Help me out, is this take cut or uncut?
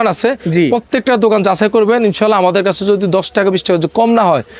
uncut